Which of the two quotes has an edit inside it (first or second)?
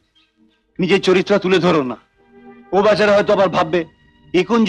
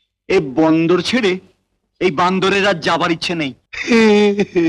second